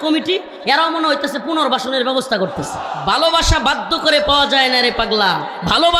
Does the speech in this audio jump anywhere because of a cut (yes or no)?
yes